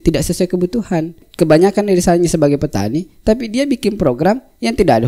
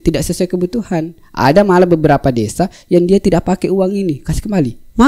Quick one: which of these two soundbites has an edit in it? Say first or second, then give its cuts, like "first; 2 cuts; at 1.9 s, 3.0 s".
first; 1 cut; at 1.2 s